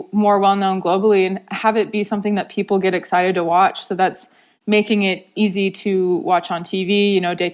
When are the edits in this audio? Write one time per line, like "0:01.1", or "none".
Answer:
0:05.3